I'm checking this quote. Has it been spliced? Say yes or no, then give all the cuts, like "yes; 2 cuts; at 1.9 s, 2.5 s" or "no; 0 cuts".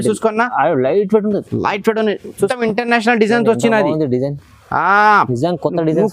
yes; 1 cut; at 2.5 s